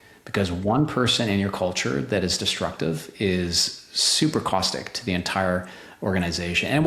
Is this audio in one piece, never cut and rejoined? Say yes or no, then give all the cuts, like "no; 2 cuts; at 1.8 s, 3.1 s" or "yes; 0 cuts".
yes; 0 cuts